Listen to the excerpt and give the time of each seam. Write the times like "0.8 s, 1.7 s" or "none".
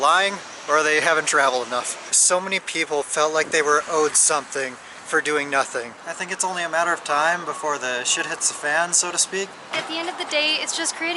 2.0 s, 5.9 s, 9.7 s

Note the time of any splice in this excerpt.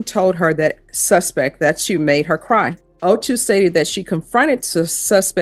2.8 s

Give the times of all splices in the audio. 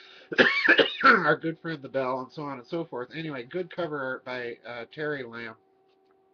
4.1 s

